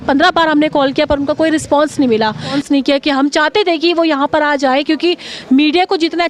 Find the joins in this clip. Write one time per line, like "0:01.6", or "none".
0:02.6